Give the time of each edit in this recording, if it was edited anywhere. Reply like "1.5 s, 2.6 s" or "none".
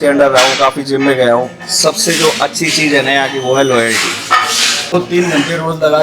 4.9 s